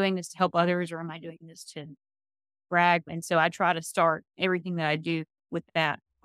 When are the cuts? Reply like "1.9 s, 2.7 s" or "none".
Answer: 3.1 s